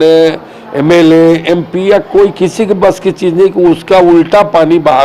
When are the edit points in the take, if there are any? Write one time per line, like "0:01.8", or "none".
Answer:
none